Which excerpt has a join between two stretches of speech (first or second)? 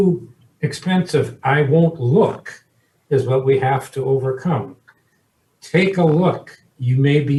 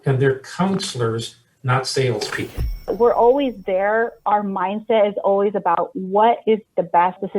second